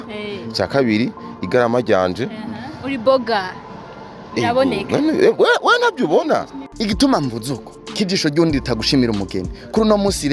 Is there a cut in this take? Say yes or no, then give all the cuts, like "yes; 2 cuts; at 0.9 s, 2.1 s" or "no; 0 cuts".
yes; 1 cut; at 6.6 s